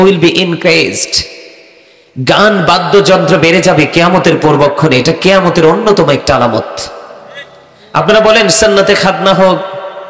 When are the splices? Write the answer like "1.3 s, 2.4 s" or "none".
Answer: none